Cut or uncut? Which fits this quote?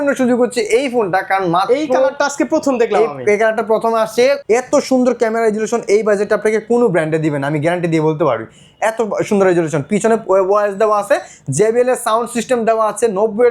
cut